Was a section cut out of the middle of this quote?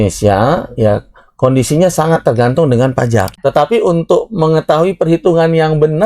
yes; 1 cut; at 3.3 s

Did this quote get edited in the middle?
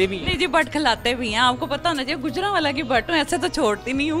no; 0 cuts

